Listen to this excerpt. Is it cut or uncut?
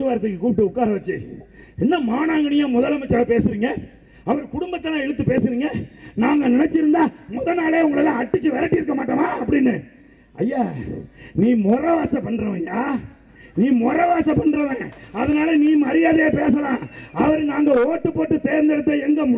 uncut